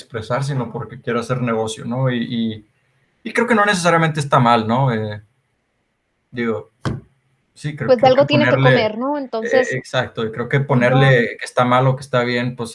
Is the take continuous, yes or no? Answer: yes